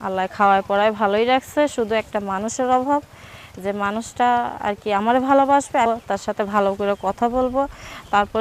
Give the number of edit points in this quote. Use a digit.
1